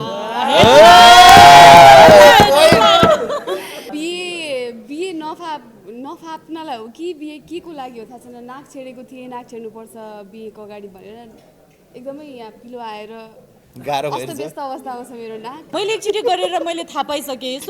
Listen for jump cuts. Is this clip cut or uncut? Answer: cut